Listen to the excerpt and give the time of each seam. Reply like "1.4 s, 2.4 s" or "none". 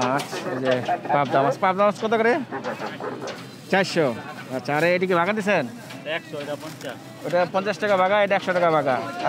none